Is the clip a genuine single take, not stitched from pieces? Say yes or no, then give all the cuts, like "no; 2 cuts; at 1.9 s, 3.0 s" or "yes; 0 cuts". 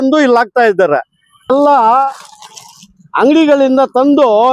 no; 1 cut; at 1.5 s